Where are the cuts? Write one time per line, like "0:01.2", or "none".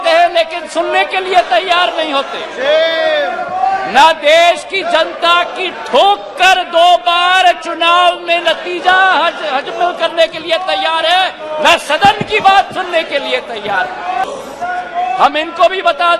0:14.2